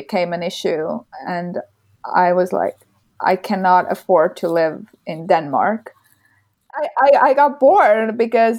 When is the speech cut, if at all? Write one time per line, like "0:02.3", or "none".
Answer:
0:06.8